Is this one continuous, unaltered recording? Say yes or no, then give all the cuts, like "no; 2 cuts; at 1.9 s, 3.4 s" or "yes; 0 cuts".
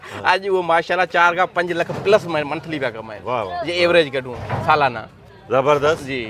yes; 0 cuts